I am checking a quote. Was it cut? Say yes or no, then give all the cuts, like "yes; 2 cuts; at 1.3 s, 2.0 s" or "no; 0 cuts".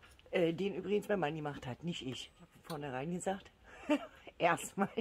yes; 1 cut; at 2.5 s